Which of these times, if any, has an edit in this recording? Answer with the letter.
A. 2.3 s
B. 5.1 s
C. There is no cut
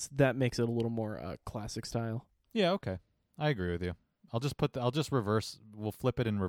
A